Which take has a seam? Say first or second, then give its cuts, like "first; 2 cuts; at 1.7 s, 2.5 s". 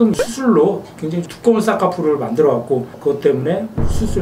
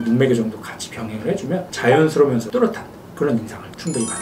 first; 1 cut; at 2.9 s